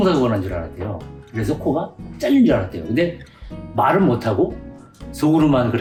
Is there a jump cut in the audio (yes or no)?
no